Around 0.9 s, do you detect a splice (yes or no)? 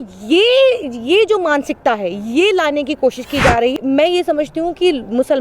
no